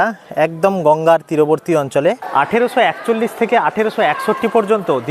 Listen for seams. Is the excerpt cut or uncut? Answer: cut